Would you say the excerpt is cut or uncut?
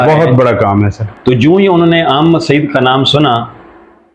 cut